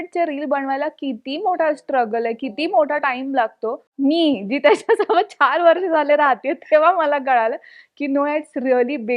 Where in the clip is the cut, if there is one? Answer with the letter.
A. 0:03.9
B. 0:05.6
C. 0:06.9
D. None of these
A